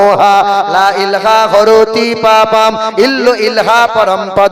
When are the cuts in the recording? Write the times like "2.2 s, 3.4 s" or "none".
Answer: none